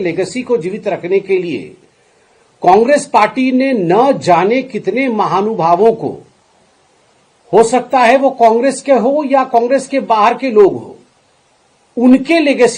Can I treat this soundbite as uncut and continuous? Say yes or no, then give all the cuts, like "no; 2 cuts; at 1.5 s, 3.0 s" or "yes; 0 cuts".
yes; 0 cuts